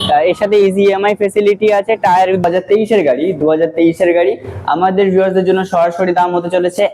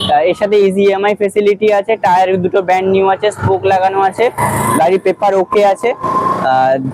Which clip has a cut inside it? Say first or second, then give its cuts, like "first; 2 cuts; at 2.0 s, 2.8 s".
first; 1 cut; at 2.4 s